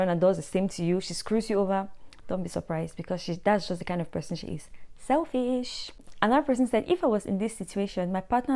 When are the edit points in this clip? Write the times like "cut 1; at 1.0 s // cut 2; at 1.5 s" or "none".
cut 1; at 6.1 s